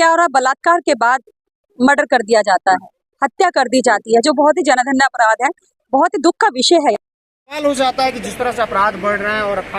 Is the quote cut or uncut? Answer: cut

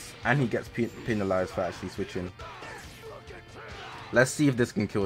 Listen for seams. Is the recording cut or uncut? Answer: cut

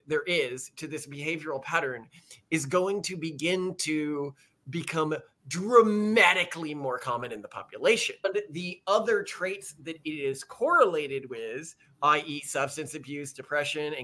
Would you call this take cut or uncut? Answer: cut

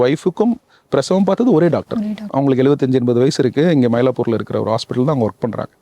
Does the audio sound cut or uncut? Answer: cut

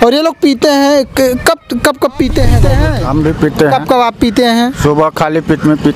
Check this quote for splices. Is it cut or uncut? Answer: cut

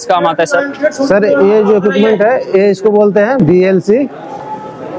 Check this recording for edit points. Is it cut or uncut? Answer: uncut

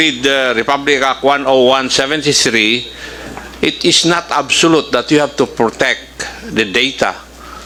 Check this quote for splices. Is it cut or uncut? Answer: uncut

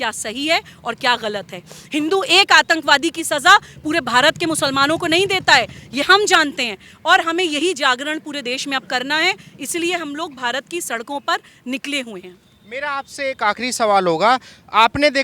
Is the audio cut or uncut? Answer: uncut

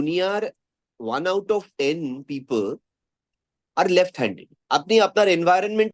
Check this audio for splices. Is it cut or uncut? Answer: cut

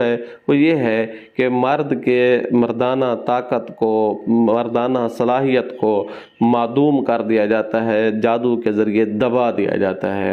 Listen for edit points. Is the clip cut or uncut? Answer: uncut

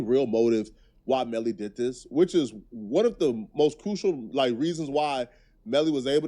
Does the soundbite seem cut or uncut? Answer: cut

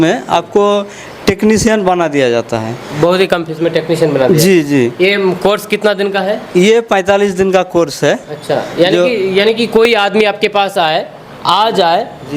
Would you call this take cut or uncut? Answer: uncut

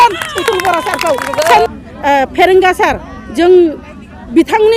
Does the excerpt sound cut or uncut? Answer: cut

